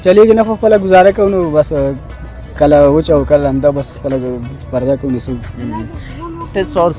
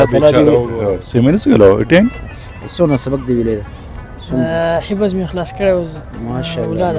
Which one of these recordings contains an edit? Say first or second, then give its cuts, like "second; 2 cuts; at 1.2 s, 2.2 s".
second; 1 cut; at 1.0 s